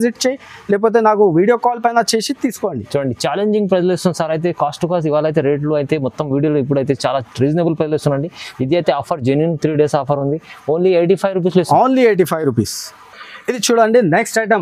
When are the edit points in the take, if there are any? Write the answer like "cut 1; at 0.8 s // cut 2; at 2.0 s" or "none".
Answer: none

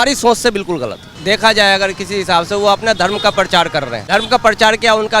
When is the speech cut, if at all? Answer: cut 1; at 1.1 s // cut 2; at 4.0 s

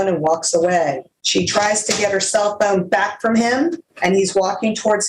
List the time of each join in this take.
cut 1; at 1.1 s // cut 2; at 3.9 s

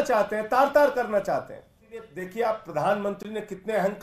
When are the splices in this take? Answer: cut 1; at 2.2 s

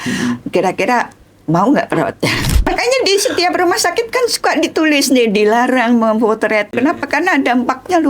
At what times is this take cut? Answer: cut 1; at 2.6 s // cut 2; at 6.8 s

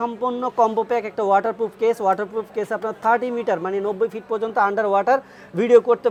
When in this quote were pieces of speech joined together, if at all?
none

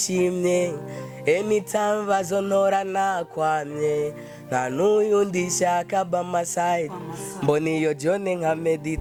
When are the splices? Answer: none

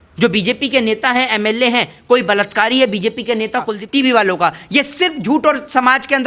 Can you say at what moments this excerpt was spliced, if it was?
cut 1; at 3.8 s

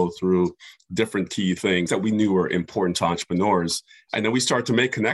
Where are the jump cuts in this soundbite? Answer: cut 1; at 1.9 s

